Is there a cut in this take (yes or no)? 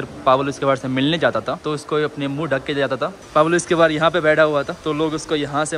yes